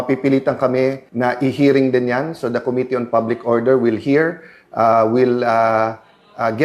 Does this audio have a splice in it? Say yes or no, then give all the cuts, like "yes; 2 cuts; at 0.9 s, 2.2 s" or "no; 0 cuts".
yes; 1 cut; at 1.1 s